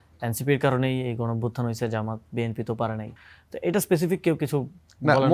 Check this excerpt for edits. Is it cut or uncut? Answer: cut